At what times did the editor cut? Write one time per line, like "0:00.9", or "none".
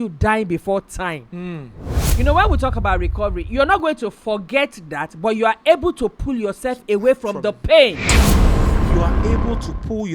0:01.9